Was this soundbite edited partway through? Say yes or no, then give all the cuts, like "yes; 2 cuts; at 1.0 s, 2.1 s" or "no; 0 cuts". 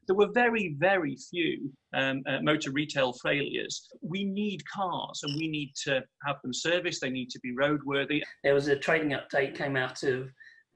yes; 2 cuts; at 4.0 s, 8.3 s